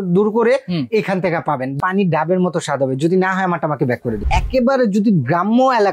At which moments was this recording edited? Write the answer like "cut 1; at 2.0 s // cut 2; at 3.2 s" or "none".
cut 1; at 1.8 s // cut 2; at 4.2 s